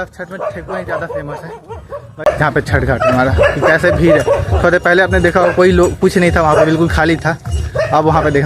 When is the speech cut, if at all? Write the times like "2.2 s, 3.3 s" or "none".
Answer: 2.3 s